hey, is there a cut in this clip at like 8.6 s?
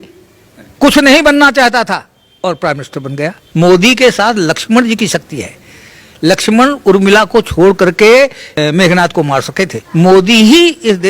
yes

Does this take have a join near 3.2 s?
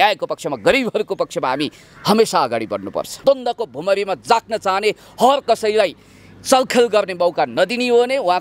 yes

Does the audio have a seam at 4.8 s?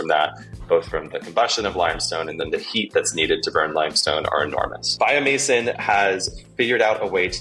yes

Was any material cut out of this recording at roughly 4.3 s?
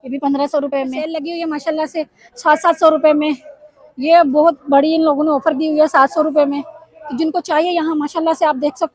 no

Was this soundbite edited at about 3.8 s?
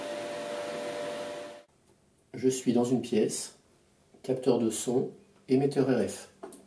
no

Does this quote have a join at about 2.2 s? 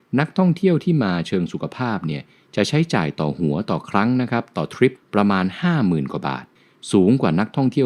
no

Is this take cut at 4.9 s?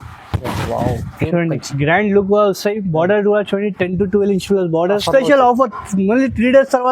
yes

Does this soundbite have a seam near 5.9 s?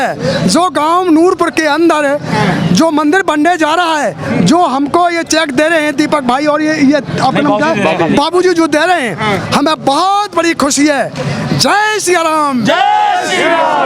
no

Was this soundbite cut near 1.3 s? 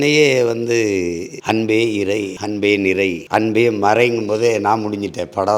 yes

